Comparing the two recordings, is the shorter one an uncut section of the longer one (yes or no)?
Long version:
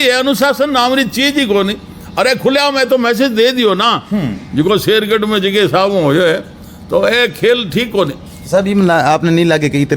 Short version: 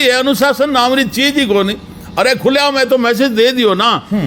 yes